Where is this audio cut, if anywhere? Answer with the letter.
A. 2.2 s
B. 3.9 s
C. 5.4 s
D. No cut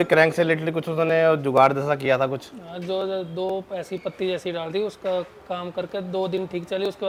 D